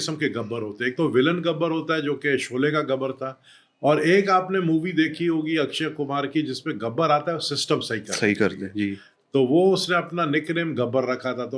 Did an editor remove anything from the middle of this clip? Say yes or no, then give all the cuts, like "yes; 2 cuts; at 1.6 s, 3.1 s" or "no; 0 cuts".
no; 0 cuts